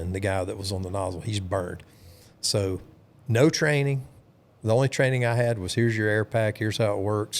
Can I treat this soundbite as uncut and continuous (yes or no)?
yes